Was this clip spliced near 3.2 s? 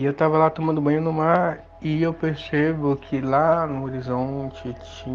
no; 1 cut; at 1.7 s

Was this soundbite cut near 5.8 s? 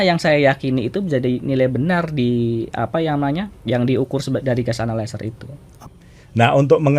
yes; 1 cut; at 5.8 s

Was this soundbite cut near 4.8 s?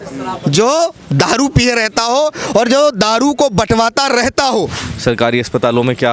yes; 1 cut; at 4.8 s

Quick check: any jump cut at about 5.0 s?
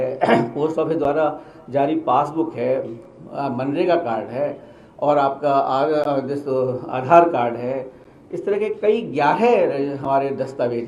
no; 0 cuts

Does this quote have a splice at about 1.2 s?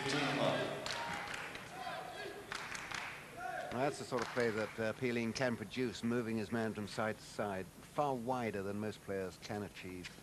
no; 1 cut; at 2.8 s

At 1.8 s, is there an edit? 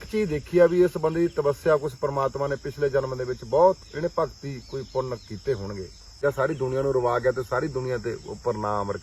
no; 1 cut; at 6.1 s

